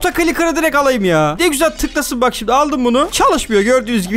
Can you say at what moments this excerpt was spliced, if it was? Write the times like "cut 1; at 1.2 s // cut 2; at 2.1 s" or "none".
cut 1; at 1.3 s